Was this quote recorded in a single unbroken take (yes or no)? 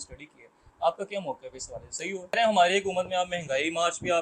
no